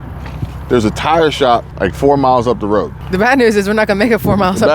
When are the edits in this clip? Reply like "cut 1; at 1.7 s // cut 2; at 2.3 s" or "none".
cut 1; at 1.7 s // cut 2; at 3.0 s